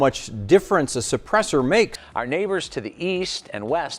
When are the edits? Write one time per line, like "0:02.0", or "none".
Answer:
0:02.1